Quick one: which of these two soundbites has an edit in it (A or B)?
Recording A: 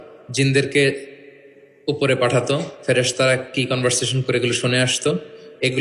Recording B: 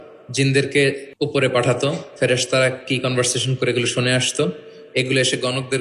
B